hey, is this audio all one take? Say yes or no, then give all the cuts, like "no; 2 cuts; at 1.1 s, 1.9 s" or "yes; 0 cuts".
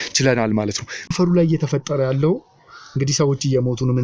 no; 1 cut; at 0.9 s